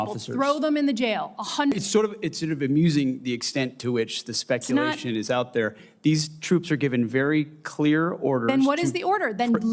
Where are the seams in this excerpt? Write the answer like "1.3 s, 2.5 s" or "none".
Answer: 1.7 s